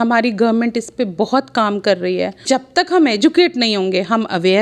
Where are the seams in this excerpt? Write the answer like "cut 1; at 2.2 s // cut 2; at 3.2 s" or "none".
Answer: cut 1; at 2.4 s